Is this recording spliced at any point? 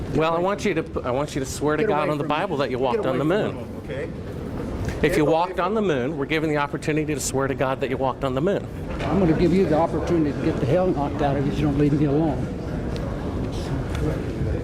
no; 0 cuts

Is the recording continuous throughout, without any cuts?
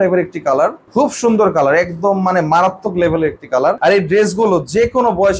yes; 0 cuts

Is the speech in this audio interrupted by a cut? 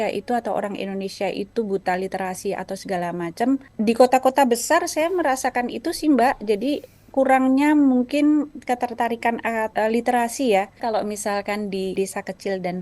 yes; 4 cuts; at 3.7 s, 9.7 s, 10.7 s, 11.9 s

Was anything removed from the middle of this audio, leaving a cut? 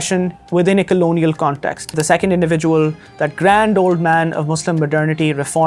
yes; 1 cut; at 2.0 s

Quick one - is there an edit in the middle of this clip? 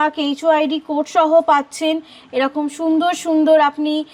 no; 0 cuts

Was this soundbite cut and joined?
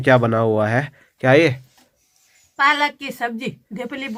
no; 0 cuts

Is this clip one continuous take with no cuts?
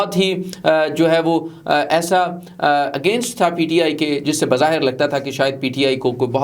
yes; 0 cuts

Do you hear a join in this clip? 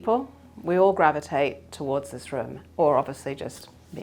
no; 0 cuts

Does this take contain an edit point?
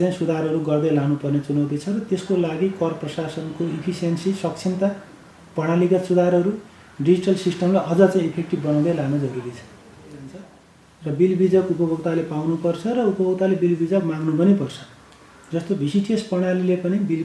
yes; 1 cut; at 10.5 s

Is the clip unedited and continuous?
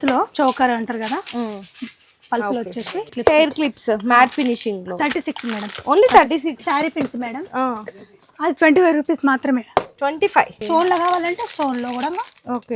no; 3 cuts; at 3.1 s, 6.6 s, 10.6 s

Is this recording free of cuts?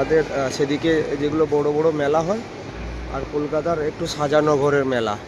yes; 0 cuts

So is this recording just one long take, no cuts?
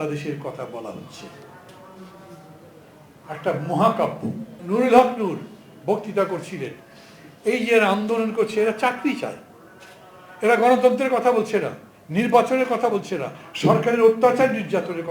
no; 1 cut; at 4.5 s

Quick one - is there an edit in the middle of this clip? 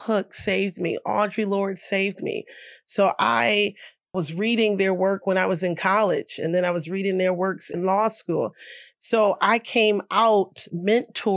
no; 0 cuts

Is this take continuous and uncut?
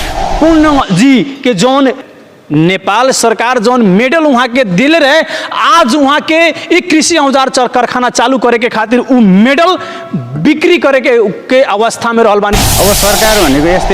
no; 2 cuts; at 2.1 s, 12.6 s

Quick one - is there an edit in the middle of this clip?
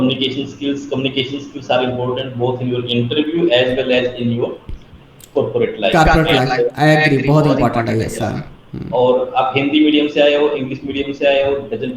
no; 0 cuts

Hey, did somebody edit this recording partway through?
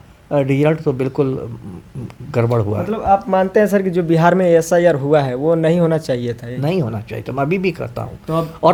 no; 0 cuts

